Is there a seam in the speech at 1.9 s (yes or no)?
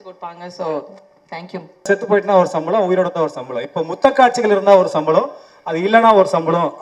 yes